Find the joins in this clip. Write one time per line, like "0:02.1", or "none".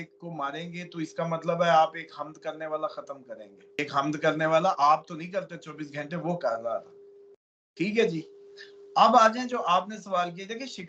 0:03.8